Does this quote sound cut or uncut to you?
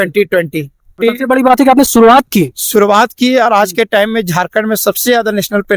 cut